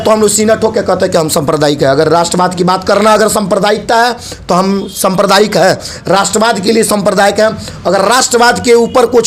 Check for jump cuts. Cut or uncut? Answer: uncut